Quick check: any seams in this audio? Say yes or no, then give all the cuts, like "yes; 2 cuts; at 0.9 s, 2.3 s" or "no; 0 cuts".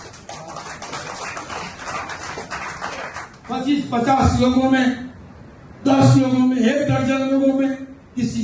yes; 1 cut; at 3.3 s